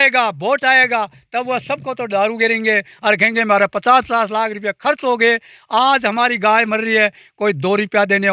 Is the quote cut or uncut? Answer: uncut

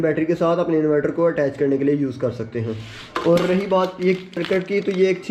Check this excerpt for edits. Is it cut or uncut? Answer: uncut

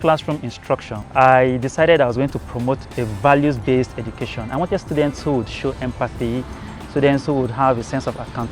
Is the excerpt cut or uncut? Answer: cut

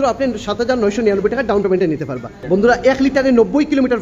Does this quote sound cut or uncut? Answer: cut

